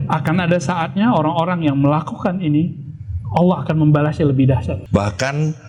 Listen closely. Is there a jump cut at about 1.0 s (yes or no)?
no